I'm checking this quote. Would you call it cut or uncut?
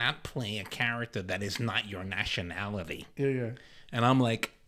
uncut